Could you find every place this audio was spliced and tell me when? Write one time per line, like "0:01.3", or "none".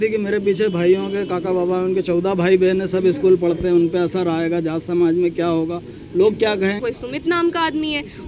0:06.8